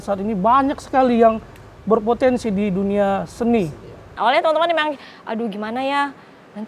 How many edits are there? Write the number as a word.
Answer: one